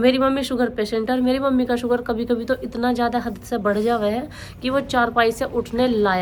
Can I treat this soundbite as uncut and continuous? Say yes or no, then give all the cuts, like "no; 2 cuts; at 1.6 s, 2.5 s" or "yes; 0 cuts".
yes; 0 cuts